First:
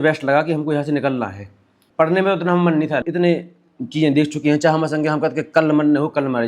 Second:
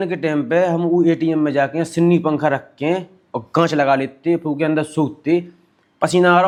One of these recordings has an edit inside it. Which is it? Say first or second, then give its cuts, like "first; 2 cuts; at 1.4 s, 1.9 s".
first; 2 cuts; at 1.8 s, 3.0 s